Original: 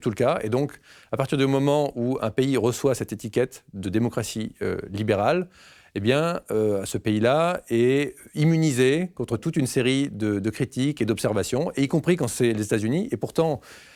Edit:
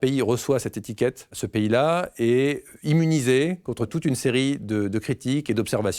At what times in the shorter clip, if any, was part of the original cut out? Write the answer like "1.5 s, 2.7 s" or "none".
1.4 s